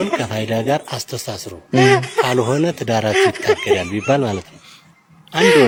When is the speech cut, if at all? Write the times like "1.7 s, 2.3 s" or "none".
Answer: none